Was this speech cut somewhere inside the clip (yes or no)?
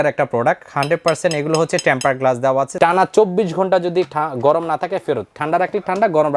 yes